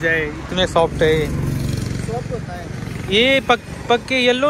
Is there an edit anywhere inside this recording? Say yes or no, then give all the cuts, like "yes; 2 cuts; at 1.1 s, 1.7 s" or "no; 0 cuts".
no; 0 cuts